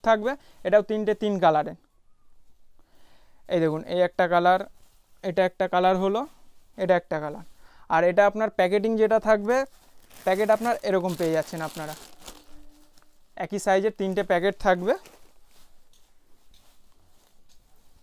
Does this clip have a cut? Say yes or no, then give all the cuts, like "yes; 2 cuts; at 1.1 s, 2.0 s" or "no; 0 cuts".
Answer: no; 0 cuts